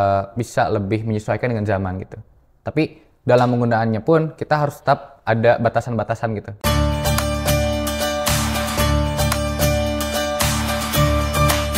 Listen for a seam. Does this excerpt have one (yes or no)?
yes